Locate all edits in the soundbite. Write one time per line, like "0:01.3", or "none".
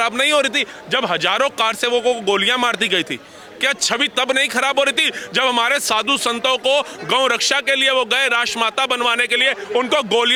none